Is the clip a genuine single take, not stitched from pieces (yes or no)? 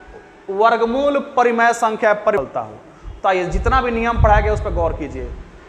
no